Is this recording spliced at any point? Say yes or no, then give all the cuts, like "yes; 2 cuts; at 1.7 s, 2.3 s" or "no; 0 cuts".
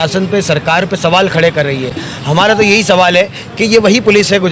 no; 0 cuts